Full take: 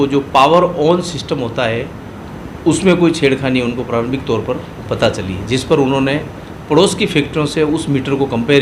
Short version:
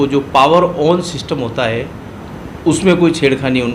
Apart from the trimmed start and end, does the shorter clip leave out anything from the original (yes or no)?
no